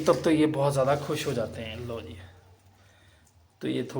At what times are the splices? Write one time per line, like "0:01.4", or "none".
none

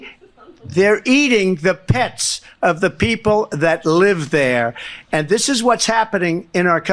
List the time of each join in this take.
none

